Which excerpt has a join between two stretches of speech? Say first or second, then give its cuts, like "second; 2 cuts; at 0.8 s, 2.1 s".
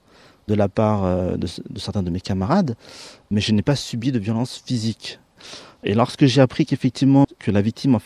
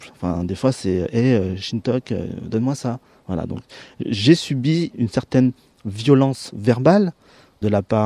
second; 1 cut; at 3.3 s